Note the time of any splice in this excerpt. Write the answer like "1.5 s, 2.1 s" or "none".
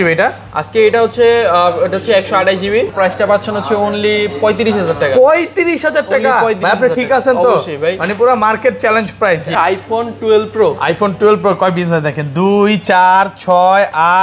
2.9 s, 9.5 s